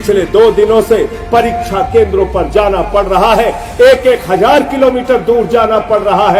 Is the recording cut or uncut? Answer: uncut